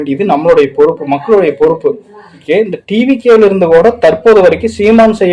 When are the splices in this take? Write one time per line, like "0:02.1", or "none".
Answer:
0:02.4